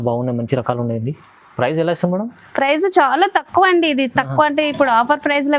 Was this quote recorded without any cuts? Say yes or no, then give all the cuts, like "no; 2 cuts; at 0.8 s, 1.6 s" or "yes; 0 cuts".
yes; 0 cuts